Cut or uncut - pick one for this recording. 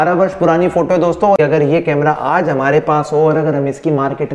cut